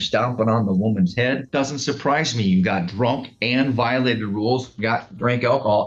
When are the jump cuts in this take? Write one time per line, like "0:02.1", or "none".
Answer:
0:01.4